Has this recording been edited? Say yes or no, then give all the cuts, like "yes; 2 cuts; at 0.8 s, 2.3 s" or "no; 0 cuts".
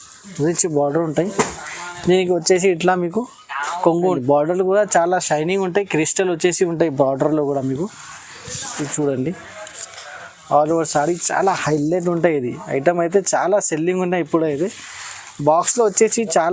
yes; 1 cut; at 4.2 s